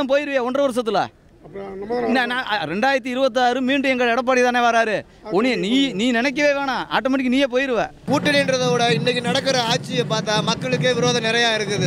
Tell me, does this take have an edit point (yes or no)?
no